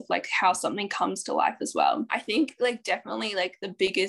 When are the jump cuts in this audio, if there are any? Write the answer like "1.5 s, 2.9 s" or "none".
2.1 s